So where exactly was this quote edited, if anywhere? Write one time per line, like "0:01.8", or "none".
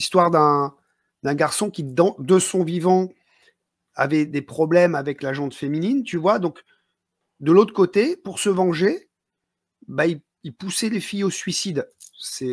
none